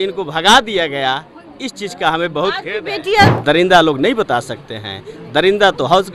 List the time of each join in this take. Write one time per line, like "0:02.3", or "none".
0:03.4